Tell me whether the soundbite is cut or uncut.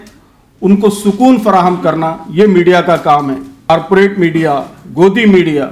cut